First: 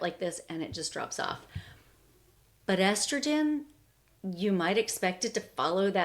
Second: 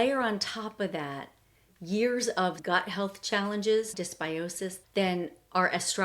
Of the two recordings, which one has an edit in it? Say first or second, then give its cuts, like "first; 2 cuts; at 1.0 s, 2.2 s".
second; 1 cut; at 3.9 s